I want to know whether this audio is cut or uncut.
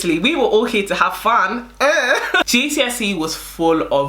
cut